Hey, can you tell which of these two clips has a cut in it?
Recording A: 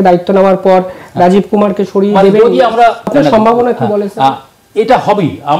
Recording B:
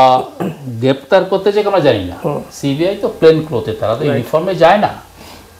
A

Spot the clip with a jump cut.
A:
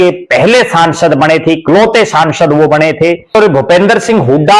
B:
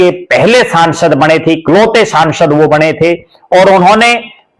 A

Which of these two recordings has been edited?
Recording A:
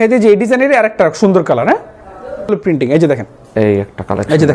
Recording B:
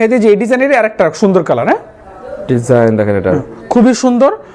A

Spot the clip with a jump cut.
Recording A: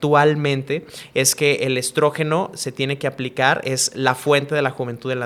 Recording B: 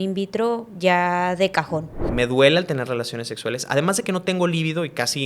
B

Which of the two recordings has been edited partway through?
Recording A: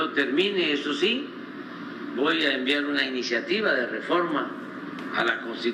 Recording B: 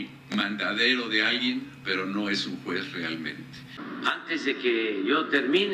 B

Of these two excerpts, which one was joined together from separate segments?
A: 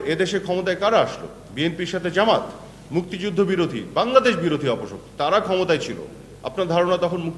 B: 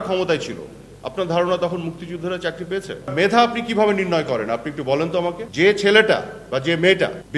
B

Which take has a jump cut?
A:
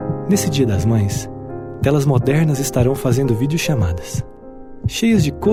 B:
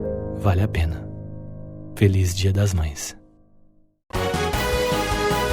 B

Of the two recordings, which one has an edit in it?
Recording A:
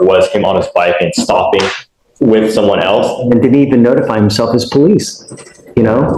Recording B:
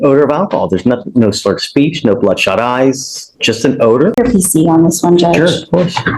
B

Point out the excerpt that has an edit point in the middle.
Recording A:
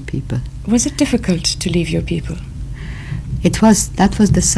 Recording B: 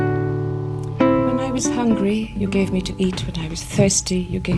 B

